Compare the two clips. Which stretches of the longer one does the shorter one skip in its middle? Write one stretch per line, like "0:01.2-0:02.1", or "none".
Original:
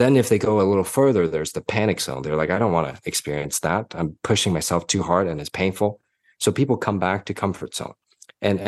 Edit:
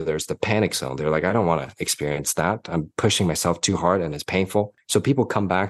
0:06.0-0:06.3